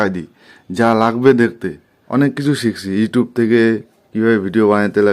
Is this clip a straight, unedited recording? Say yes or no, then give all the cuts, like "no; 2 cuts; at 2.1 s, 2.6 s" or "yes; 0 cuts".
no; 1 cut; at 2.0 s